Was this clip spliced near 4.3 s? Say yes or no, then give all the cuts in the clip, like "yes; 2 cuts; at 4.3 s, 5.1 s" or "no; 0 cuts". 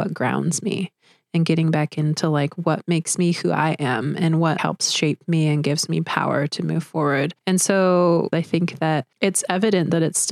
no; 1 cut; at 8.3 s